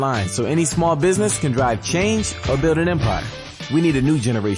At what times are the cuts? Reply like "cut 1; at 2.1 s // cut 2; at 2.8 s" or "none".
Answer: cut 1; at 3.5 s